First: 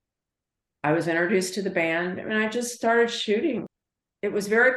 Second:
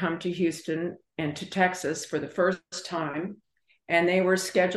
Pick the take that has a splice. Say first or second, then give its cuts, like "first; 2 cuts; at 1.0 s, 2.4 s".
first; 1 cut; at 3.7 s